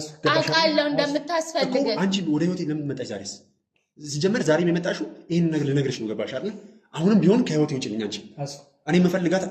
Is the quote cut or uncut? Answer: uncut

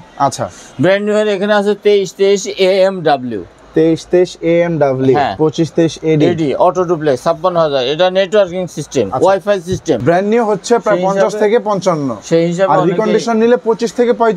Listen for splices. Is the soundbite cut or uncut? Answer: cut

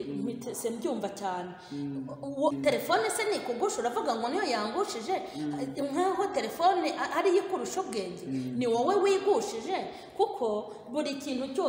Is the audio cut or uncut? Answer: cut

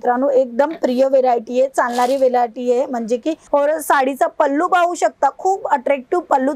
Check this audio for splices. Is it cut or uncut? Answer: cut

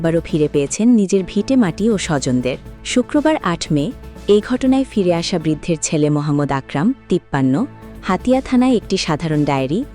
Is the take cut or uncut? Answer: cut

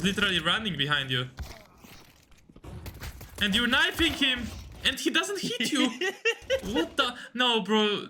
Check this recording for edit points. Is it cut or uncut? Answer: uncut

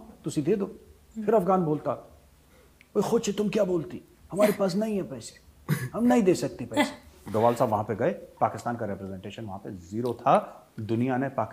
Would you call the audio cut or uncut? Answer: cut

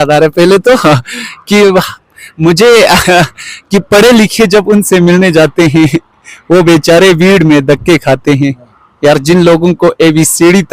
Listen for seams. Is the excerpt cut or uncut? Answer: uncut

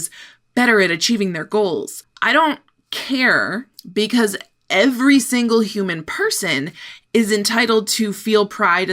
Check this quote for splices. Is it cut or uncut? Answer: uncut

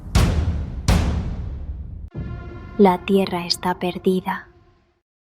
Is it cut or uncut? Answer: cut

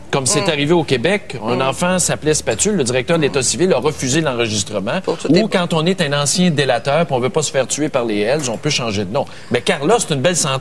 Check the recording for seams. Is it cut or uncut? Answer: uncut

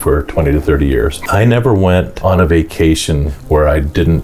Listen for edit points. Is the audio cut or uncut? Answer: cut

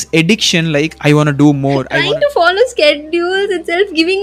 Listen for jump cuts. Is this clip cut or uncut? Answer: cut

